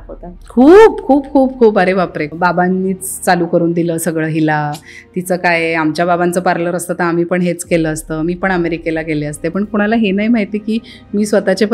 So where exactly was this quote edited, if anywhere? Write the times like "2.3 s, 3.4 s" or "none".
2.3 s